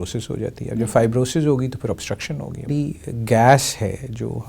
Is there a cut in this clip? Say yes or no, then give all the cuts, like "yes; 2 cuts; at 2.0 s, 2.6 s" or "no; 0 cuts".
yes; 1 cut; at 2.7 s